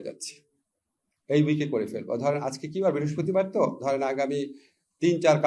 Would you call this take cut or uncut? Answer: uncut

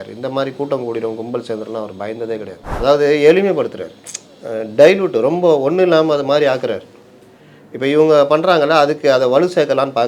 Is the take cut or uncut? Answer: cut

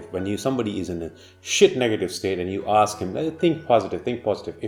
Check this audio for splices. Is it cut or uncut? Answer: uncut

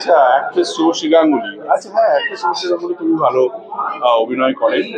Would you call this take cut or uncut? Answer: uncut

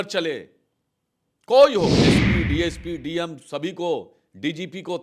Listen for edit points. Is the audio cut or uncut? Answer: cut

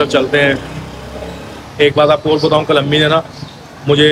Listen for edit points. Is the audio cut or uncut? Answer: uncut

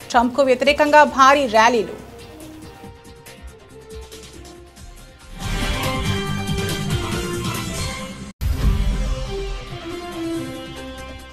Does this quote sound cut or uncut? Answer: cut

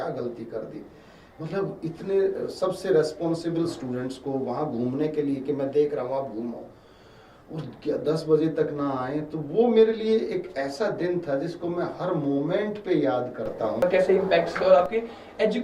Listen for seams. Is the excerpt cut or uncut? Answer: cut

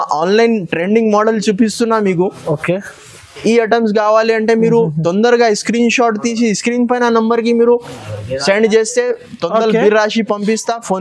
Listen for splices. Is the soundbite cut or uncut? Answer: uncut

